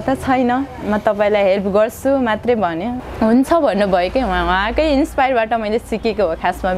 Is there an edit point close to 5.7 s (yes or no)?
no